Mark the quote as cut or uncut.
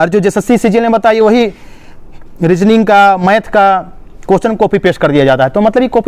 uncut